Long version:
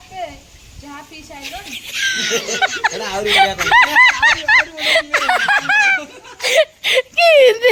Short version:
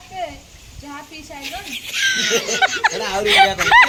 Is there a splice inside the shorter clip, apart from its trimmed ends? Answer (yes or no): no